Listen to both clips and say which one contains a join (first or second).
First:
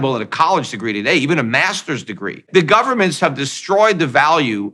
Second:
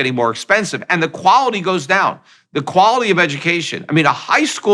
first